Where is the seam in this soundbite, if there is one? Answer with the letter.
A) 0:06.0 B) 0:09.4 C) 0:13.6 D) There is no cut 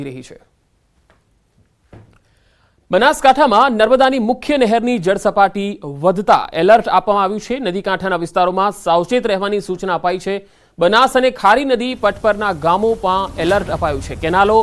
B